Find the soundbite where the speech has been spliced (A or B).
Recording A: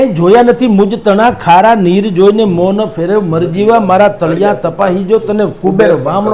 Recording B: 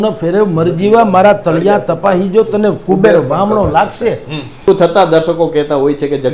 B